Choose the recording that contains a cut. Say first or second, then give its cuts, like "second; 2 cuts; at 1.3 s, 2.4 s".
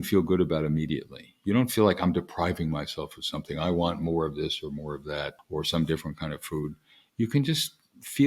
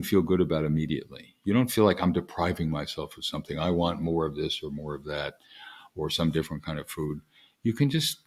first; 1 cut; at 5.4 s